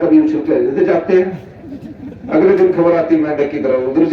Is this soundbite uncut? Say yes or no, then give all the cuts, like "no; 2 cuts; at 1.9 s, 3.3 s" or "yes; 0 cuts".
yes; 0 cuts